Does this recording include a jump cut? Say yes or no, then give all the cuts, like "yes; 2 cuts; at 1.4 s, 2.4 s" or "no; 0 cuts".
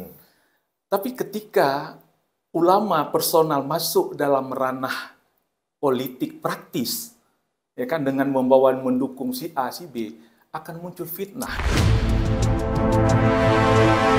yes; 1 cut; at 11.5 s